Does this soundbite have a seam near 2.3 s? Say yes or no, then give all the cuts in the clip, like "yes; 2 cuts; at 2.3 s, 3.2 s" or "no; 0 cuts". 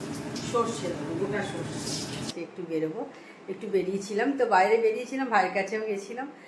yes; 1 cut; at 2.3 s